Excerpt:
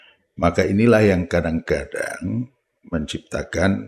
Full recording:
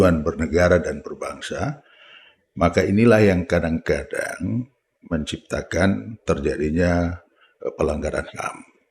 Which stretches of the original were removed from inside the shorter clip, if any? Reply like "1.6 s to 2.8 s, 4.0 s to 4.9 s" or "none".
none